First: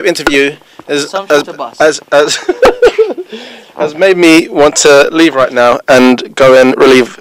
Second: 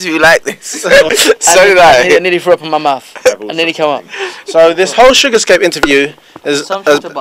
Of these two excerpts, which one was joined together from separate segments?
second; 2 cuts; at 1.1 s, 4.5 s

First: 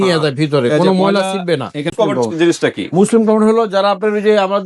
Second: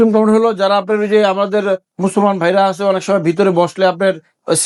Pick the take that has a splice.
first; 1 cut; at 1.9 s

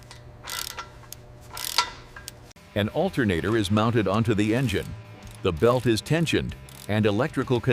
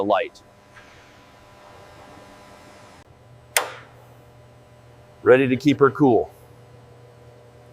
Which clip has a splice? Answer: second; 1 cut; at 3.0 s

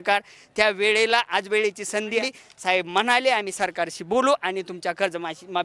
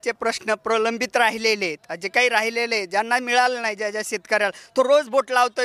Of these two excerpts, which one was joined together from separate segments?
first; 1 cut; at 2.2 s

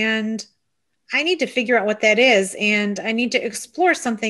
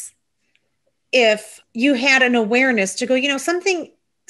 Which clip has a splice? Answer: second; 1 cut; at 1.6 s

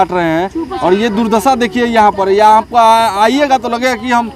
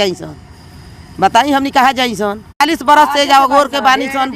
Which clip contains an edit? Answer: second; 1 cut; at 2.6 s

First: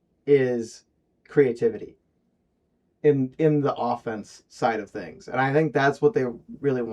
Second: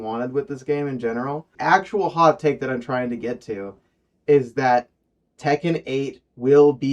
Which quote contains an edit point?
second; 1 cut; at 1.5 s

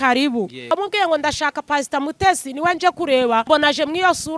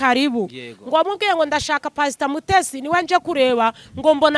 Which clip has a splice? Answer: first; 2 cuts; at 0.7 s, 3.5 s

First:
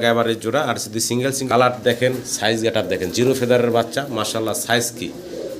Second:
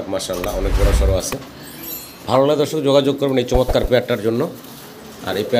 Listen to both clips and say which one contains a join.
first; 1 cut; at 1.4 s

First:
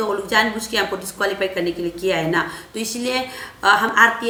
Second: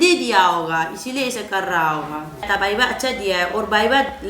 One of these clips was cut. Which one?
second; 1 cut; at 2.5 s

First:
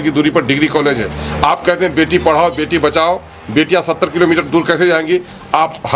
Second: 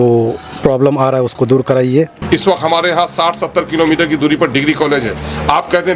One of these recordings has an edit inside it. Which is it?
second; 1 cut; at 2.2 s

